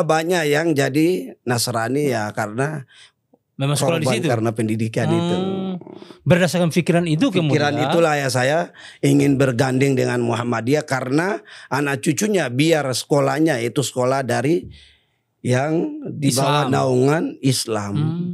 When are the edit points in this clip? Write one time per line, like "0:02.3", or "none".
none